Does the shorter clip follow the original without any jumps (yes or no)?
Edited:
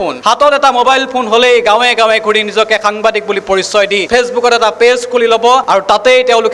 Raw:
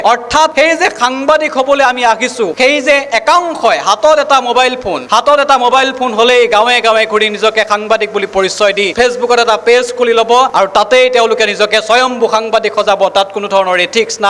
yes